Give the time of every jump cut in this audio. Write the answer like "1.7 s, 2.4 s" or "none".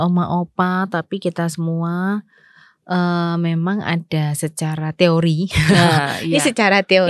none